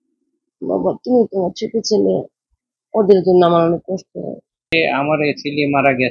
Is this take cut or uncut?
cut